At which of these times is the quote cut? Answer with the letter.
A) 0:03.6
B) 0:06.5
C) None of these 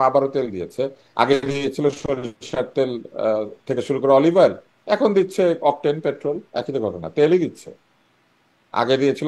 C